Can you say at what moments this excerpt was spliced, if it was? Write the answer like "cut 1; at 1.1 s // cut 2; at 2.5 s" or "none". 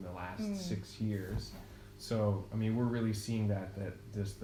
none